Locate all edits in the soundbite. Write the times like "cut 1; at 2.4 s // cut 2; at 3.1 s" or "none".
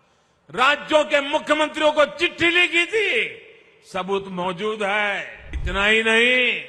cut 1; at 5.6 s

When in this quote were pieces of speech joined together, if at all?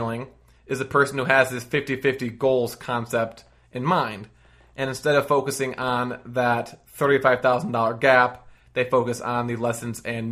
none

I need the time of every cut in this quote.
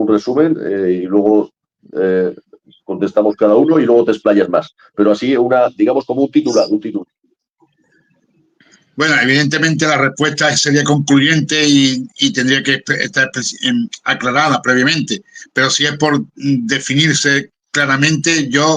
none

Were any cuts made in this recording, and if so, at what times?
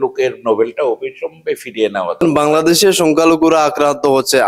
cut 1; at 2.2 s

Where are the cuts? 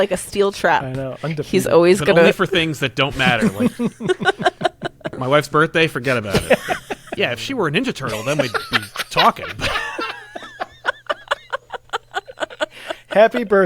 cut 1; at 5.1 s // cut 2; at 7.1 s

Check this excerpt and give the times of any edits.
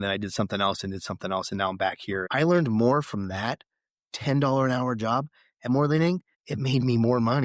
cut 1; at 2.2 s

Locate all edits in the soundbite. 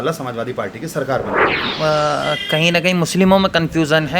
cut 1; at 1.6 s

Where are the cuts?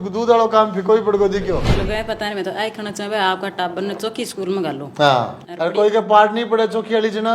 cut 1; at 1.7 s // cut 2; at 5.4 s

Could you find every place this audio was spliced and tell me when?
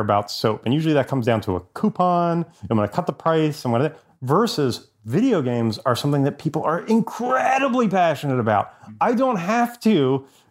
cut 1; at 2.5 s

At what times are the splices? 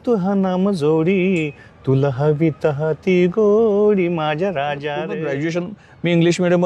cut 1; at 5.1 s

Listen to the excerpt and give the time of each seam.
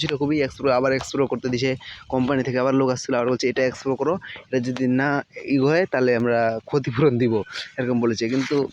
none

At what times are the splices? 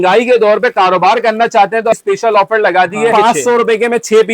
cut 1; at 1.9 s // cut 2; at 3.1 s

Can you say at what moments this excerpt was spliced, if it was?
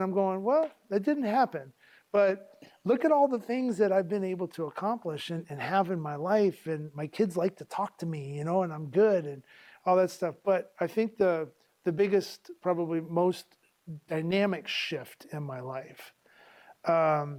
none

